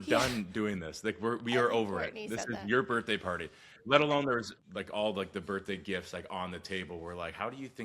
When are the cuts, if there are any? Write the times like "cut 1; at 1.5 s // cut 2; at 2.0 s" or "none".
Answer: cut 1; at 4.6 s